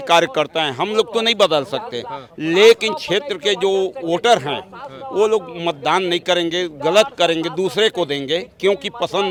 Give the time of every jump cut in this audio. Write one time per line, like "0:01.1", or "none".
none

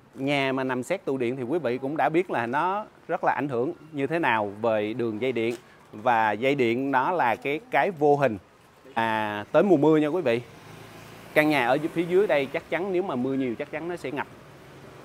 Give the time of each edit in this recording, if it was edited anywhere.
0:09.0

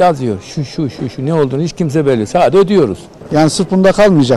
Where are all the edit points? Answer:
0:03.2

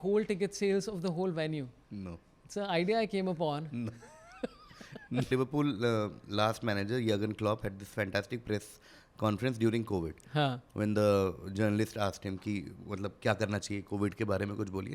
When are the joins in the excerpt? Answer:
0:05.3

